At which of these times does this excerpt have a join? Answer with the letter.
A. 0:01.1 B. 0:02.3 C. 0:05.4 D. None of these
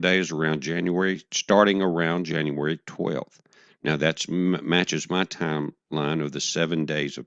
B